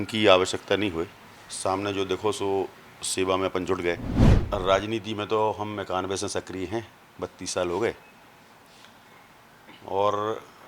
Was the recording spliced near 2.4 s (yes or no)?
no